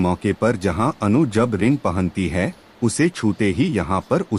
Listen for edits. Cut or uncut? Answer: uncut